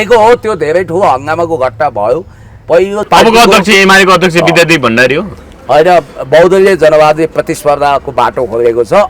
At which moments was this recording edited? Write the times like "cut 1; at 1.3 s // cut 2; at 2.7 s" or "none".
cut 1; at 3.1 s